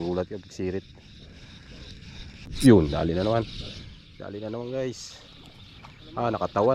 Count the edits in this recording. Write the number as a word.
one